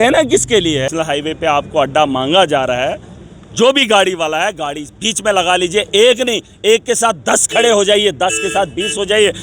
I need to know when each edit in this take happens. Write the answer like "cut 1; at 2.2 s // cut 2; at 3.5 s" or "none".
cut 1; at 0.9 s